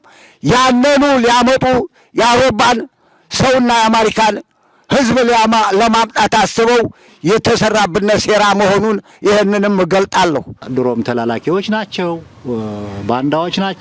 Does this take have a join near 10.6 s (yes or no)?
yes